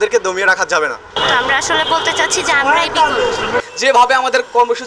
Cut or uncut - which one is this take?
cut